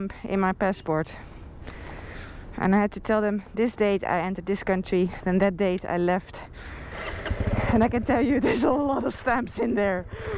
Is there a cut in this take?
no; 0 cuts

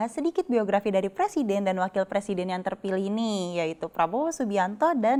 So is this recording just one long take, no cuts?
yes; 0 cuts

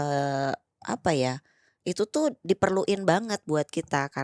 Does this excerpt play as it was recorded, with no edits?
yes; 0 cuts

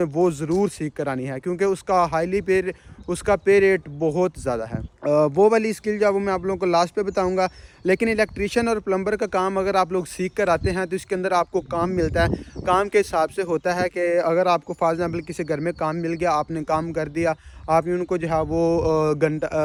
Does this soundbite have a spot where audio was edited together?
no; 0 cuts

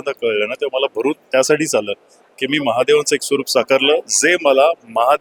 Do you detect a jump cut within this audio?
no; 0 cuts

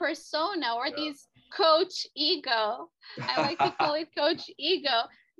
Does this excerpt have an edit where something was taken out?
yes; 1 cut; at 1.5 s

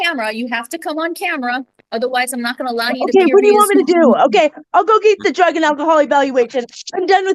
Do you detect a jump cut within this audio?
no; 0 cuts

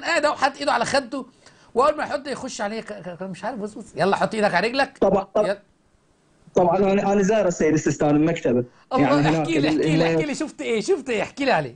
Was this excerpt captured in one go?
yes; 0 cuts

